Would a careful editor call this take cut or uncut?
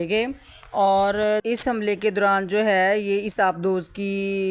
uncut